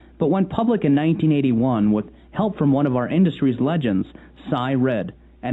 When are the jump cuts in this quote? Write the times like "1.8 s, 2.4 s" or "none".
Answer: 2.0 s